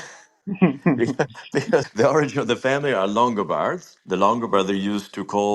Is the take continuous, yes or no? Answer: no